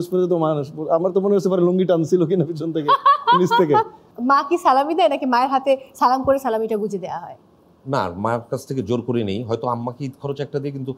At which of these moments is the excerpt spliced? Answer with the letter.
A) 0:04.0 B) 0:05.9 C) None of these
A